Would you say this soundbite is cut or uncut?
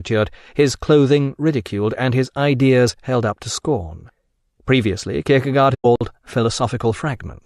uncut